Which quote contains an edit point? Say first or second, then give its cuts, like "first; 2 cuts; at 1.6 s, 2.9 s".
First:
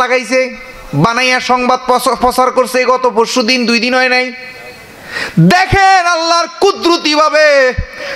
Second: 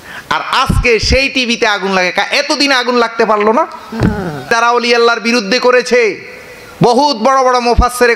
second; 1 cut; at 4.5 s